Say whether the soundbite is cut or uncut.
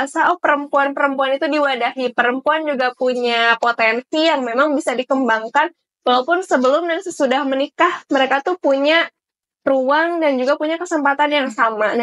uncut